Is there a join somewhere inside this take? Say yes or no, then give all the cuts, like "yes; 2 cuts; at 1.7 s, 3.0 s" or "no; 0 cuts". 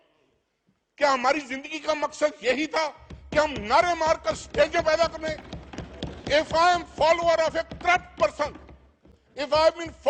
no; 0 cuts